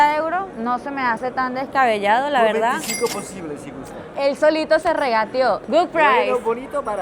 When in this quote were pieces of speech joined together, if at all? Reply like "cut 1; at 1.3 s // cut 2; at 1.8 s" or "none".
cut 1; at 4.1 s // cut 2; at 5.6 s